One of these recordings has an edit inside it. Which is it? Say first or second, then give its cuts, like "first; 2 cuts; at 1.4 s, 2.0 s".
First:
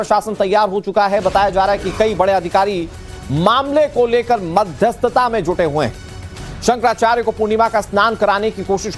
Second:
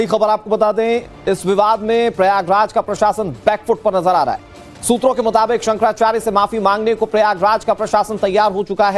first; 1 cut; at 2.1 s